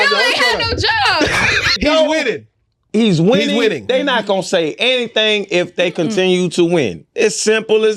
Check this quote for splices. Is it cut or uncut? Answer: cut